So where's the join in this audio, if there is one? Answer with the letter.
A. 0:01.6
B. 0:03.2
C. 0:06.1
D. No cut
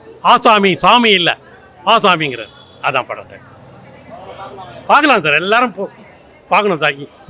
D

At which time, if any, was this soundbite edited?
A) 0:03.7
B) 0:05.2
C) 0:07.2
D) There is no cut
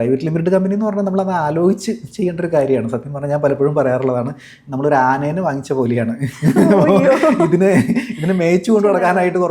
D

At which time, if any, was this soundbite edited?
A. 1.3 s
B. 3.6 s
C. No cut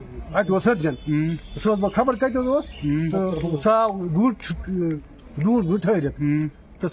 C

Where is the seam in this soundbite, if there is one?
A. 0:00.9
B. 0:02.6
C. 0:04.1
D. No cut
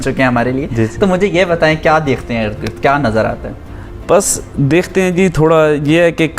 D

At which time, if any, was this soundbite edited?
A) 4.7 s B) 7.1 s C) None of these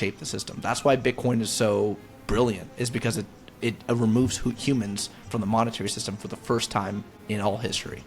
B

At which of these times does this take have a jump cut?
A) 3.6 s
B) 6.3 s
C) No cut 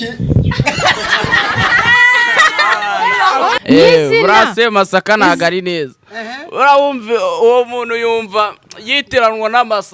A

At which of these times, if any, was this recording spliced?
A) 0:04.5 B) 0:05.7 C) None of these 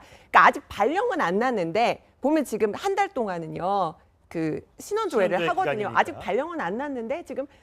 B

